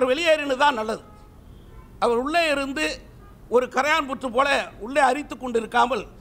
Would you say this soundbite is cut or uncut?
uncut